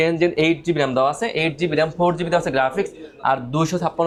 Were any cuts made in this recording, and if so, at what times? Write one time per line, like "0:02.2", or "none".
none